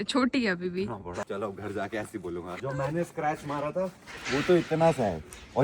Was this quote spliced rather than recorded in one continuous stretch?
yes; 2 cuts; at 1.2 s, 2.6 s

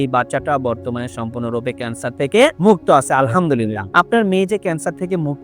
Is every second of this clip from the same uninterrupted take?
yes; 0 cuts

